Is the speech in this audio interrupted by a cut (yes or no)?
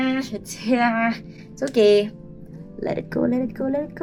no